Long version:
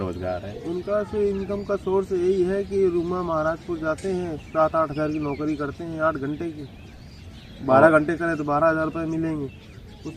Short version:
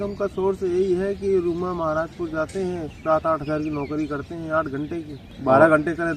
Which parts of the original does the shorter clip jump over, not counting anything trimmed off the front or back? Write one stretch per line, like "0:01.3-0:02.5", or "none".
0:06.7-0:07.4